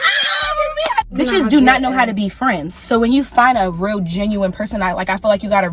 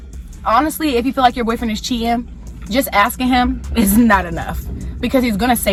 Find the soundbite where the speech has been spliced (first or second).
first